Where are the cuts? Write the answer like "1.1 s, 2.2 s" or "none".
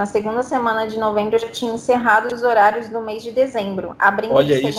none